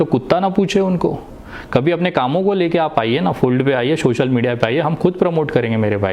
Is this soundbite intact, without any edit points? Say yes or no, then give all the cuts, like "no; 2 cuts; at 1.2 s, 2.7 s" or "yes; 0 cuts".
yes; 0 cuts